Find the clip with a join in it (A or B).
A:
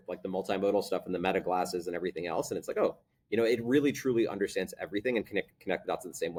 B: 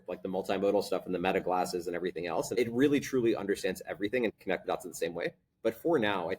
B